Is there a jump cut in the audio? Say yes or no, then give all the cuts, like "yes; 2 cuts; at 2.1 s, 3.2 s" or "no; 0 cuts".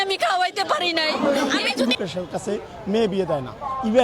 yes; 1 cut; at 1.9 s